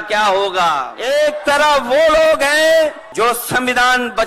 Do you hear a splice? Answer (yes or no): yes